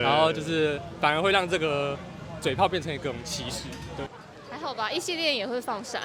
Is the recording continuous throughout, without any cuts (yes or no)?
no